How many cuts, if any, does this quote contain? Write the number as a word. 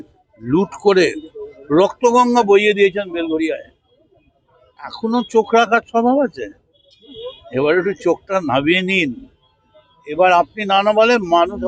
zero